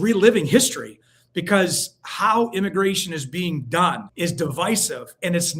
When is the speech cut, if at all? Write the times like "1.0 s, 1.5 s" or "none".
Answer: 4.1 s